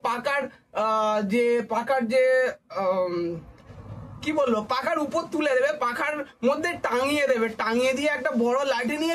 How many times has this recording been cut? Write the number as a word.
zero